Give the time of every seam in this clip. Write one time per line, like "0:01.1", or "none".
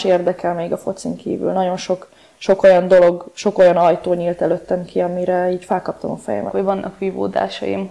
0:06.5